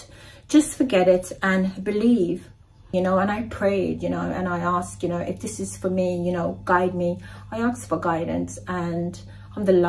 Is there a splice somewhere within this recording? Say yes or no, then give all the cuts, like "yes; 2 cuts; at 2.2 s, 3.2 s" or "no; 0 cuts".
yes; 1 cut; at 2.9 s